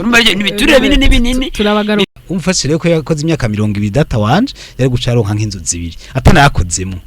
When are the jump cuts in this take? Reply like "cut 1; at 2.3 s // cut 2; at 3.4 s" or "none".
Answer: cut 1; at 2.1 s